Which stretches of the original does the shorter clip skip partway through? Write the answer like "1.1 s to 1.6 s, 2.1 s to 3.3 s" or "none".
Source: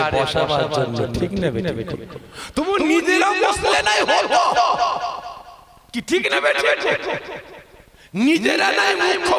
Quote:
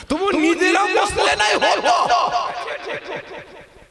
5.1 s to 6.6 s